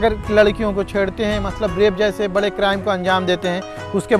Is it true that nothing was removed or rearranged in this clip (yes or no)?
yes